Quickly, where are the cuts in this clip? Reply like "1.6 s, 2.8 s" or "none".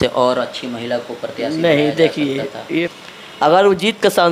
2.8 s